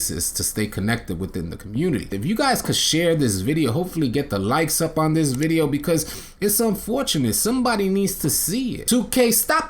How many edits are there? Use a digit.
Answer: 2